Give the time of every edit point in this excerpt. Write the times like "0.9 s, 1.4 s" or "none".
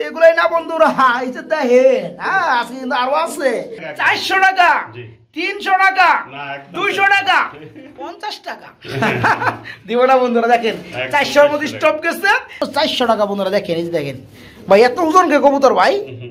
3.8 s, 12.6 s

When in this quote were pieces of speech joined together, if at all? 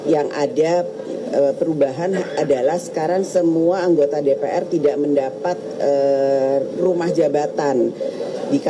none

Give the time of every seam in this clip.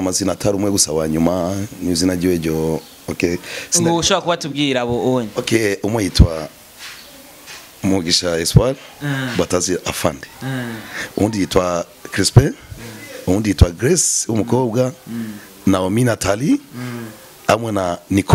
none

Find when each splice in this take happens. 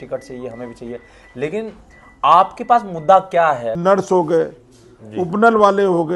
3.7 s

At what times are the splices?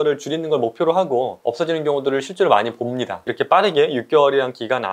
1.4 s, 3.3 s

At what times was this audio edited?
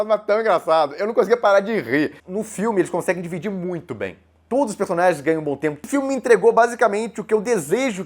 2.2 s, 5.8 s

